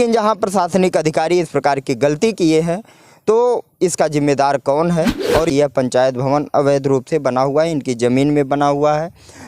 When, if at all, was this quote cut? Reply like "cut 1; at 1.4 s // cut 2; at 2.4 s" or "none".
cut 1; at 5.5 s